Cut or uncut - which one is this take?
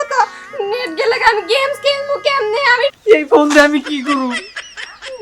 cut